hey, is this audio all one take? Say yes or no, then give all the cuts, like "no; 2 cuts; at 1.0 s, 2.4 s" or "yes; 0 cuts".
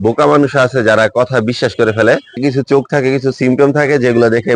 no; 1 cut; at 2.3 s